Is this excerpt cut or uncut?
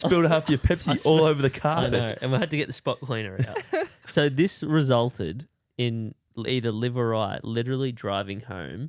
cut